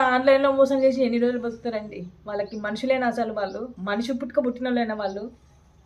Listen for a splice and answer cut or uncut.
uncut